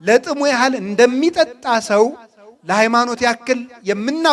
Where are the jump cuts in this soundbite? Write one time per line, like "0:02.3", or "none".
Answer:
none

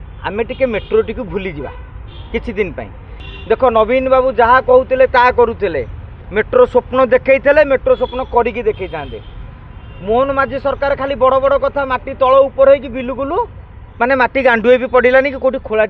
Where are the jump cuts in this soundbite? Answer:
0:03.2

